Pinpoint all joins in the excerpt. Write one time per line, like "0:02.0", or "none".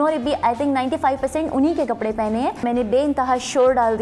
0:02.6